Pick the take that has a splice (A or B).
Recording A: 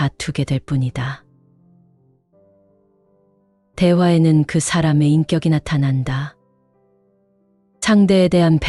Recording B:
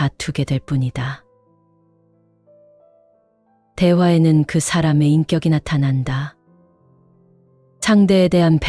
B